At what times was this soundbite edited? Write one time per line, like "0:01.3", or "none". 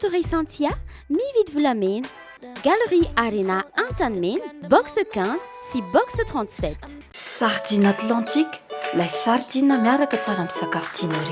0:07.0